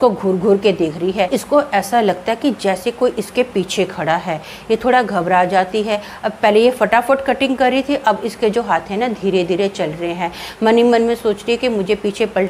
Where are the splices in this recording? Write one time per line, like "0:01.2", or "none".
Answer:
0:01.3